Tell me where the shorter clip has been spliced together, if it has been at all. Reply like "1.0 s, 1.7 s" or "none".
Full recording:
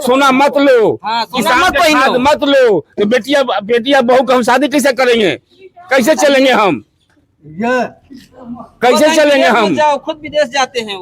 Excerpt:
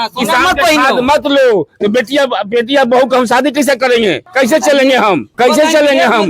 4.2 s, 5.3 s